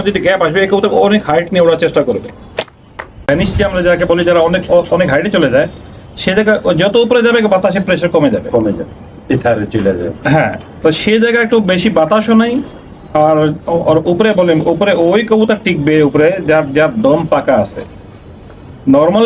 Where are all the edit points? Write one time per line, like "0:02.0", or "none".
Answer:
0:03.2